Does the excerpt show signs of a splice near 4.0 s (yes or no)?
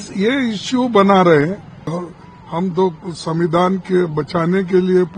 no